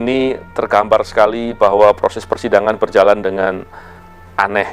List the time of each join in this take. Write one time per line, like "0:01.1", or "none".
none